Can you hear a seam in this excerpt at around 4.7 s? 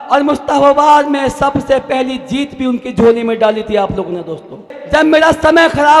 yes; 1 cut; at 4.7 s

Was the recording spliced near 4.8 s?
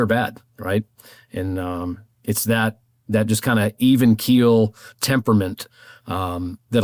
no; 0 cuts

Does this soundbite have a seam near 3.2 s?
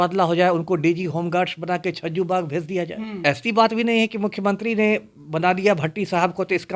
yes; 1 cut; at 3.2 s

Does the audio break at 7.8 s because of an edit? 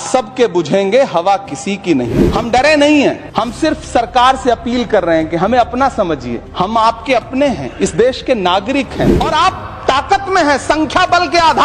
no; 4 cuts; at 2.1 s, 3.2 s, 6.4 s, 9.1 s

